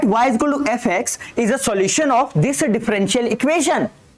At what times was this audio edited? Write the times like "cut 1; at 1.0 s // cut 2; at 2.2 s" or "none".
none